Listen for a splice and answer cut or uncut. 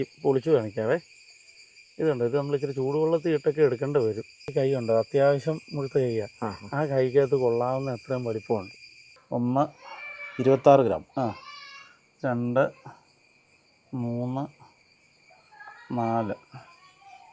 cut